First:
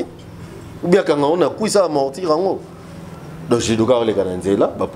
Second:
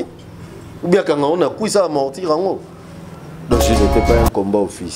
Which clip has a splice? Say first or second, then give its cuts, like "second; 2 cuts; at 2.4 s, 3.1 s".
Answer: second; 1 cut; at 3.8 s